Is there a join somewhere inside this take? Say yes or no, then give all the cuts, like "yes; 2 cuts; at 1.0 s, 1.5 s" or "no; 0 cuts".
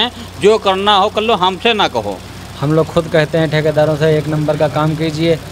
yes; 1 cut; at 2.3 s